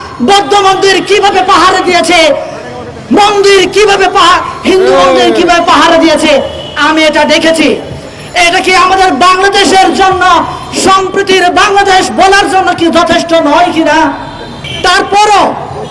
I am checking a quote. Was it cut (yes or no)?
no